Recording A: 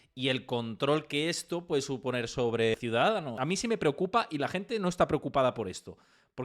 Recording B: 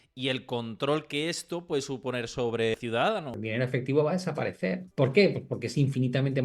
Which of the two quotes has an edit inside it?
B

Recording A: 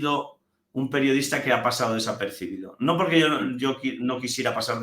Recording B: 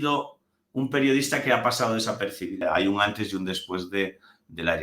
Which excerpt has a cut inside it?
B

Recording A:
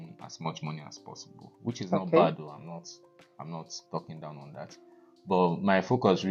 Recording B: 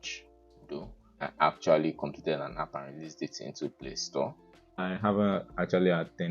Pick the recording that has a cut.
B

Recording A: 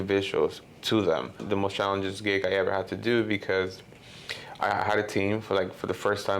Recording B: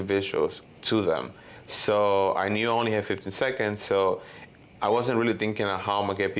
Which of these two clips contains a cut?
A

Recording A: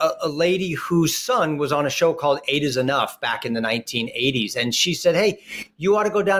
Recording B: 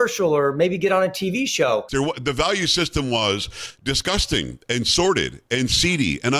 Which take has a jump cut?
B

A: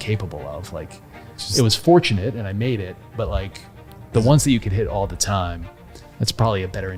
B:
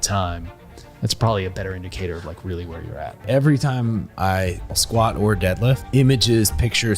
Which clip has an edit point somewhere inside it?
B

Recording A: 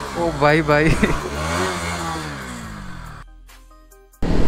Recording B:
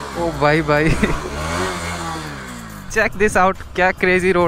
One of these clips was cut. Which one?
B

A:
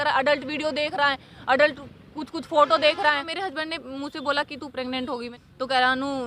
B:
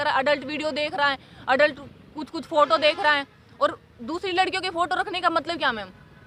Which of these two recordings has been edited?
A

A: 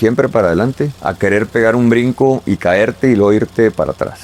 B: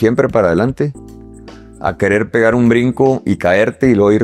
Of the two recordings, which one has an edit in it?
A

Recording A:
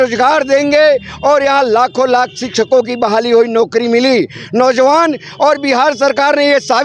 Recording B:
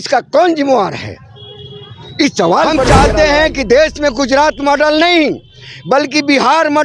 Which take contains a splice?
B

